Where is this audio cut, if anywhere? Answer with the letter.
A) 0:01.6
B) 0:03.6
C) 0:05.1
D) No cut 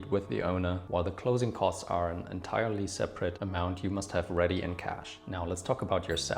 C